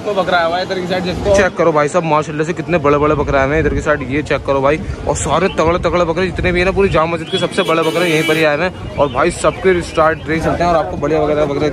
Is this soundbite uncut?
no; 2 cuts; at 1.4 s, 10.4 s

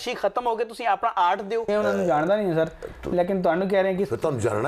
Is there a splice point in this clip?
yes; 1 cut; at 1.7 s

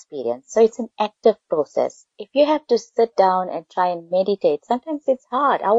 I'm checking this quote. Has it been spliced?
no; 0 cuts

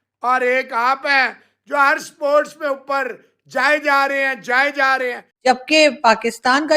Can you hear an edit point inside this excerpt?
yes; 1 cut; at 5.3 s

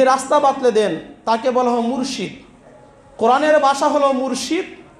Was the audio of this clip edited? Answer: no; 0 cuts

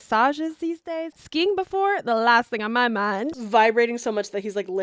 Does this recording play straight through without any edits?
no; 2 cuts; at 1.2 s, 3.3 s

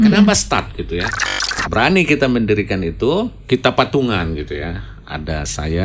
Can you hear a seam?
yes; 2 cuts; at 1.6 s, 3.4 s

